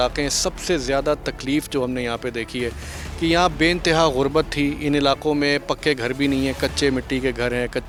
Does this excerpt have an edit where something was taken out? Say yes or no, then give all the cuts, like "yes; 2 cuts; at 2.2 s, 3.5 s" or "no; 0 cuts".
no; 0 cuts